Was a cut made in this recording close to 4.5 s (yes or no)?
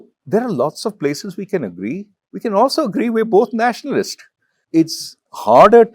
yes